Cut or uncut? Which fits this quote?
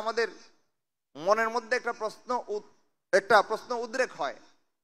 uncut